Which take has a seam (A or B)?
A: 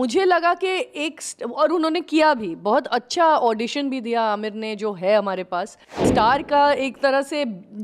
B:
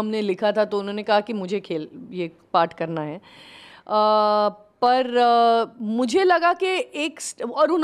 A